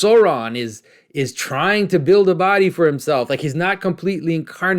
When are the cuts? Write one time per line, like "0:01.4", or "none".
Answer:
none